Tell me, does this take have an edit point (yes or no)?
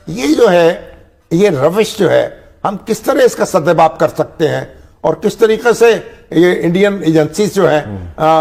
no